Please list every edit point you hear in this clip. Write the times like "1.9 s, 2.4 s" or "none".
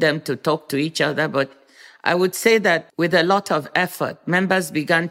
2.8 s